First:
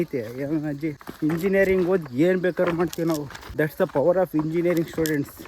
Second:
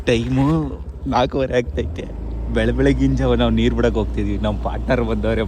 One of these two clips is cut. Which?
first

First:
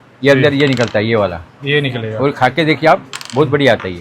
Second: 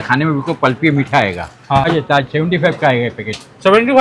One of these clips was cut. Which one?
second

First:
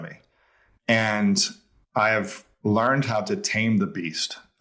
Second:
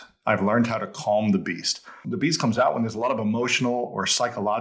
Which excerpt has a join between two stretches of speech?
second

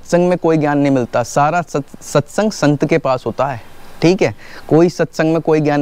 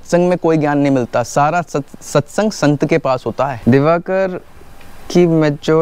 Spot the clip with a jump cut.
second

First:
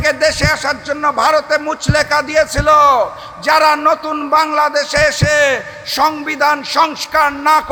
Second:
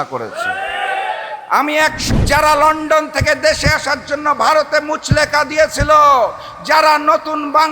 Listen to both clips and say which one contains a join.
second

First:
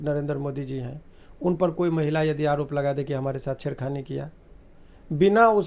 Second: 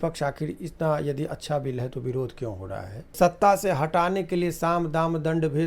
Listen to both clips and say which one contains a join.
second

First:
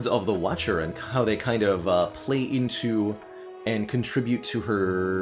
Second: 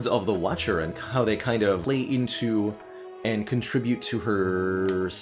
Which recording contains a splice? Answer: second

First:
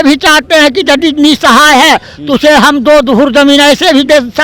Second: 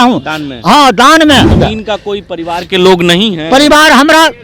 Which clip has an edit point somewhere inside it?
second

